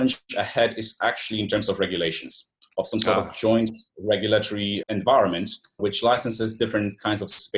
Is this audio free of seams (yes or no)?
no